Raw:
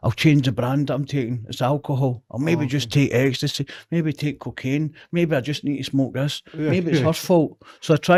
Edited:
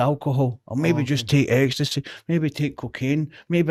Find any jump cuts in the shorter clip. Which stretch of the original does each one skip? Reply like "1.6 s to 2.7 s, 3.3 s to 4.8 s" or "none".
none